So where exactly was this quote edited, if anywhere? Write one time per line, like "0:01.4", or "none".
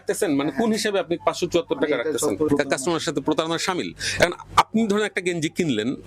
0:02.5